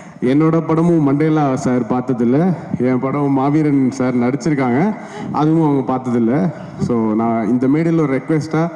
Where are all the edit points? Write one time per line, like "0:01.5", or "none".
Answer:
none

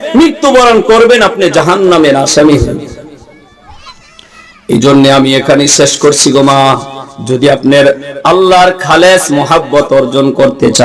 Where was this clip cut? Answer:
none

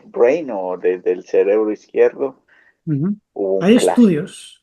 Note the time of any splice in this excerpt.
0:03.3

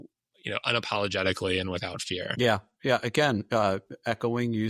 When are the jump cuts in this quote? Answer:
none

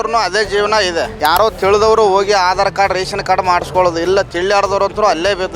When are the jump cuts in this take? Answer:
0:01.1

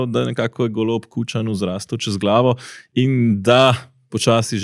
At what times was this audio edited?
none

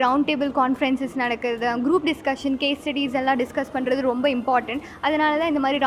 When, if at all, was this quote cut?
none

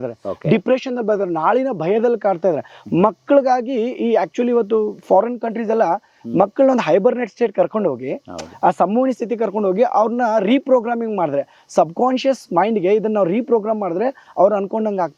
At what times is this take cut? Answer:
none

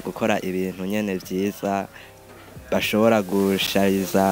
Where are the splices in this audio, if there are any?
none

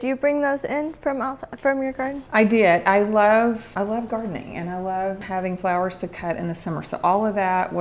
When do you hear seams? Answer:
0:03.7
0:05.2

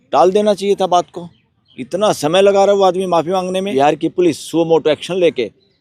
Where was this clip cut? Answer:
0:03.7

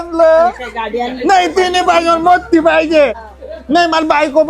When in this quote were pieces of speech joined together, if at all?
0:03.3

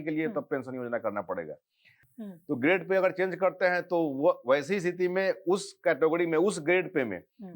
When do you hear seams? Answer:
0:02.1

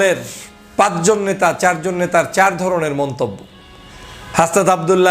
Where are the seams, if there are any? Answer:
none

